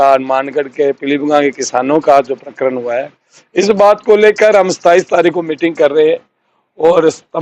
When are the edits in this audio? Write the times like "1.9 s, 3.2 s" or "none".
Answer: none